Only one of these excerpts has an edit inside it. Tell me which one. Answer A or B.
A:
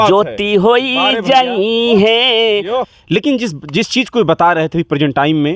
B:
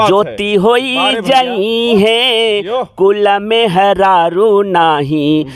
A